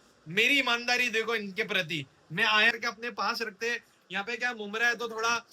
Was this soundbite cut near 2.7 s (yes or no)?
yes